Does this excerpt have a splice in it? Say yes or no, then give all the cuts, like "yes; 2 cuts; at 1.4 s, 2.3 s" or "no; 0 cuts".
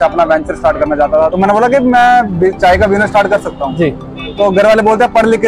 yes; 1 cut; at 1.3 s